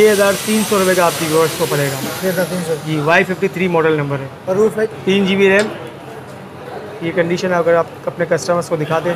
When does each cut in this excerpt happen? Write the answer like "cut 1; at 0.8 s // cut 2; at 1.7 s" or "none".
cut 1; at 4.9 s